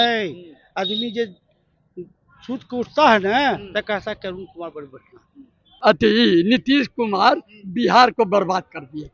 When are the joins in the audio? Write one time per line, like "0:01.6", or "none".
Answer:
0:05.7